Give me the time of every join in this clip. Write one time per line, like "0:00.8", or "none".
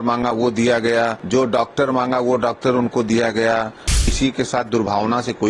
0:01.2
0:04.1